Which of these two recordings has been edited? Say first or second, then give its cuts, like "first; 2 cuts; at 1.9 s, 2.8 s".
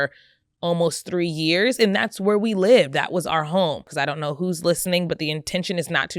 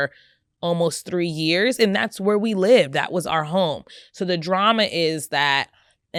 first; 1 cut; at 3.9 s